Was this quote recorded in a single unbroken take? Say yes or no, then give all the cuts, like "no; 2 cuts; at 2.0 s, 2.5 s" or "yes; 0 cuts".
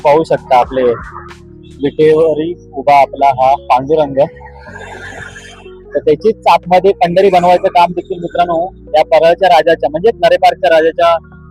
yes; 0 cuts